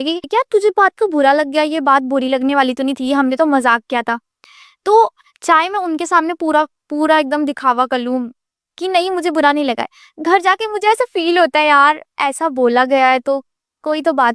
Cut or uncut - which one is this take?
uncut